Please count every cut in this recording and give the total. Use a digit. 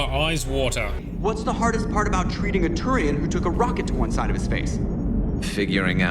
1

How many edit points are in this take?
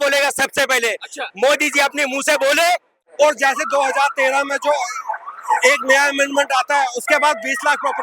1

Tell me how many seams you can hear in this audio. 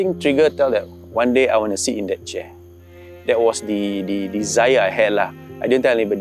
0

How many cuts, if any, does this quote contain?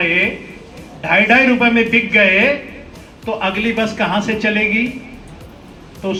0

